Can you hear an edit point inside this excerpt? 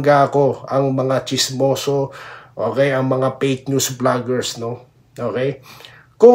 no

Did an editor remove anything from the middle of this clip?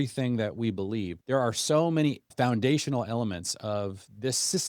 yes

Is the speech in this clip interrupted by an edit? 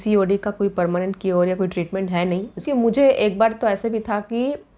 yes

